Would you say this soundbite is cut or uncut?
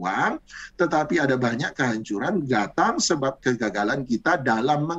uncut